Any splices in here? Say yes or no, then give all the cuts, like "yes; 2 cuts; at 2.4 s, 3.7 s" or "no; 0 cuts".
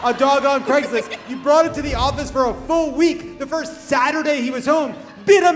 no; 0 cuts